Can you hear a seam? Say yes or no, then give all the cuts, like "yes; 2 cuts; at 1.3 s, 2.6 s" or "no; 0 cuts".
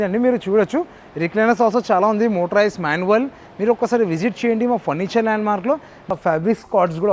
yes; 1 cut; at 6.1 s